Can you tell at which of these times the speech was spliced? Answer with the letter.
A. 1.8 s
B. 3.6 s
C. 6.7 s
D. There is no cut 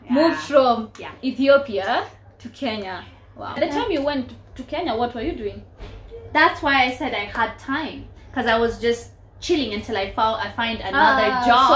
B